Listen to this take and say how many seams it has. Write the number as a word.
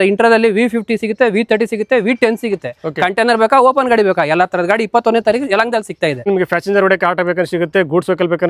one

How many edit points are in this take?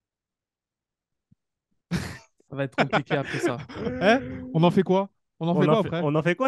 zero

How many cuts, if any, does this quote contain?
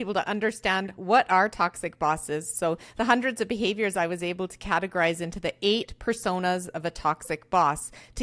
zero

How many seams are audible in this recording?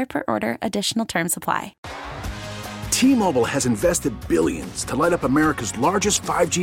one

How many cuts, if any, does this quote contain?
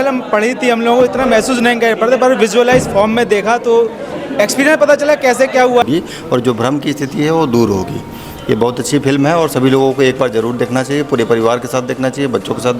one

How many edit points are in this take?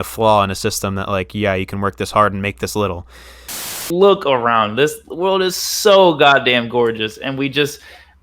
one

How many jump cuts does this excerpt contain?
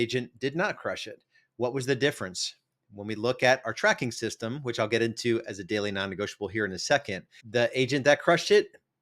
zero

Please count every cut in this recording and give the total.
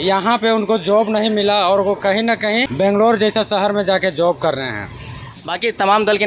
two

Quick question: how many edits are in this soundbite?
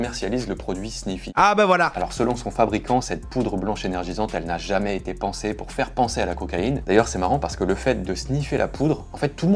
three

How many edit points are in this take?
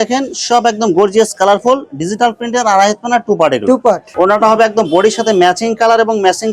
one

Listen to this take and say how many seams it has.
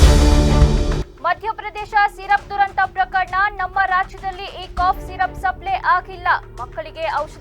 one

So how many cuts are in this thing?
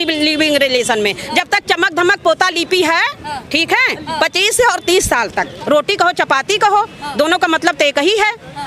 one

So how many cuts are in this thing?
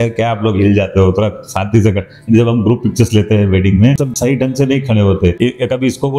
two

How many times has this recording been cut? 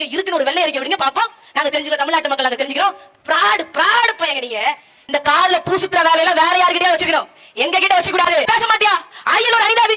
two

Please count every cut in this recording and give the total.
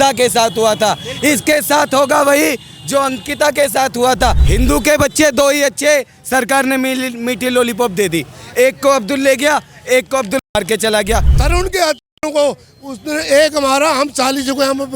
two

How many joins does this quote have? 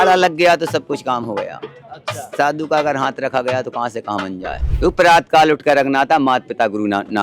one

